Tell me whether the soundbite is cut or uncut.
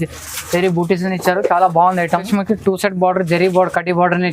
cut